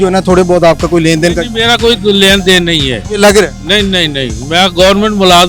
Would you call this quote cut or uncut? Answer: uncut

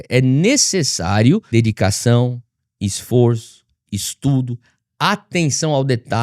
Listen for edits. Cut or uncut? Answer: cut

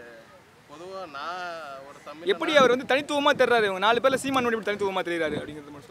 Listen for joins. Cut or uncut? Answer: uncut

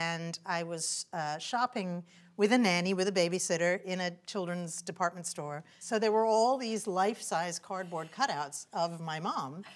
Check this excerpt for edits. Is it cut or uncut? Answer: cut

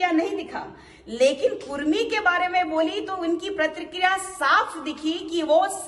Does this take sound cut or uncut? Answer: uncut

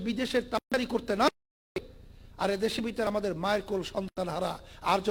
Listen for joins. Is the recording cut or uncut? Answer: uncut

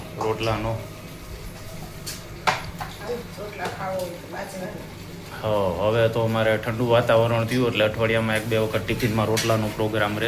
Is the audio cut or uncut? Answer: uncut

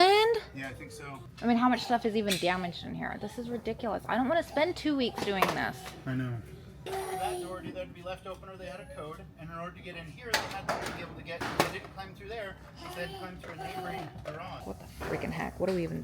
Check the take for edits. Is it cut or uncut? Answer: cut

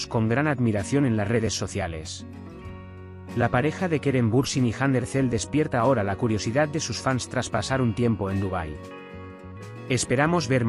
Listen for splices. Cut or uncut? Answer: cut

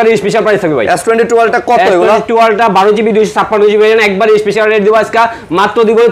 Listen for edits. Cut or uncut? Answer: uncut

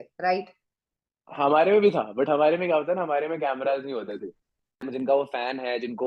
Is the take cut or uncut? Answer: cut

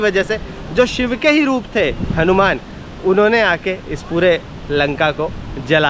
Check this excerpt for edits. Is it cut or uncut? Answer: uncut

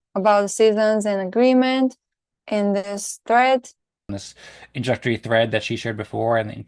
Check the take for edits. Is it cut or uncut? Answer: cut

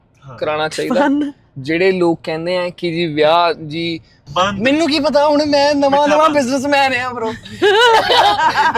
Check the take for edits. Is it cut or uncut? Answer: cut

